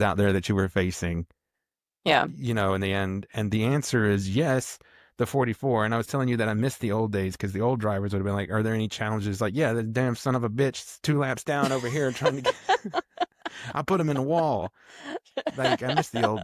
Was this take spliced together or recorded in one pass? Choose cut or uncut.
uncut